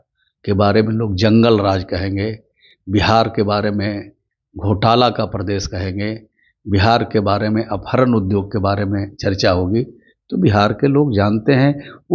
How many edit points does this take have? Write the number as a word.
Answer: zero